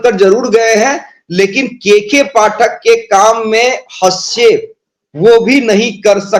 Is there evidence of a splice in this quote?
no; 0 cuts

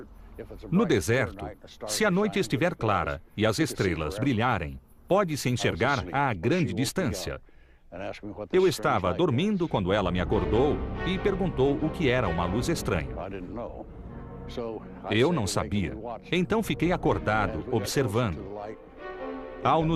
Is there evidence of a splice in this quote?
no; 0 cuts

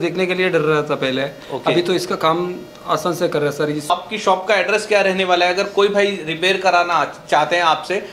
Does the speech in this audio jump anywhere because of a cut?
yes; 1 cut; at 3.9 s

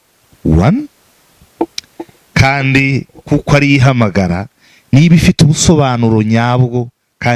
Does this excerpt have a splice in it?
no; 0 cuts

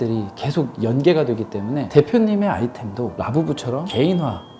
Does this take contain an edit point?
no; 0 cuts

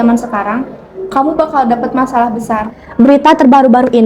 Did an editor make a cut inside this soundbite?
yes; 1 cut; at 2.8 s

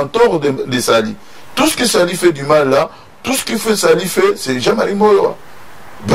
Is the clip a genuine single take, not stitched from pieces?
yes; 0 cuts

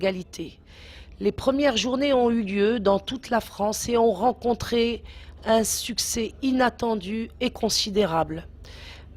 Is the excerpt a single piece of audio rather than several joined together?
no; 1 cut; at 4.7 s

